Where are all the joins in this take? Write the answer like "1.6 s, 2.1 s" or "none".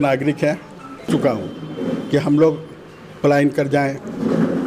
1.1 s